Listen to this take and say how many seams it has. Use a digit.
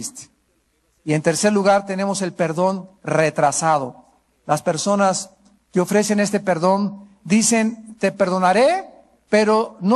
1